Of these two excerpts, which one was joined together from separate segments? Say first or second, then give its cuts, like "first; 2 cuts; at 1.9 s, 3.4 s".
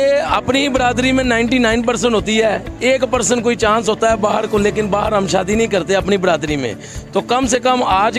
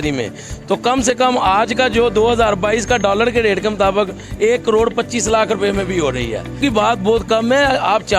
second; 1 cut; at 6.6 s